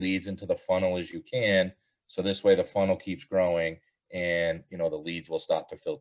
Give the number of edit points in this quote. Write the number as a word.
zero